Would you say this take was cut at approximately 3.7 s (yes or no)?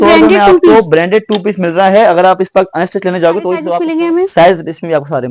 yes